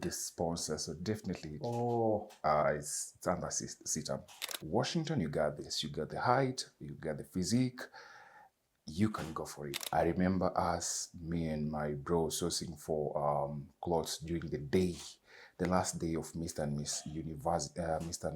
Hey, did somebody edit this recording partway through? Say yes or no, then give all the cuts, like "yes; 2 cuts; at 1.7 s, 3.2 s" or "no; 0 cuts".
yes; 2 cuts; at 4.5 s, 9.8 s